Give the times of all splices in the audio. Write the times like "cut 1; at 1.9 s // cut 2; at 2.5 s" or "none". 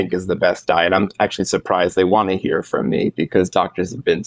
none